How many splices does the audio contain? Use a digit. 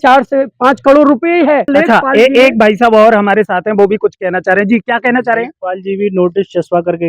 1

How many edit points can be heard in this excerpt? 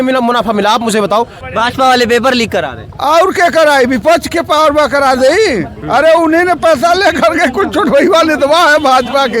1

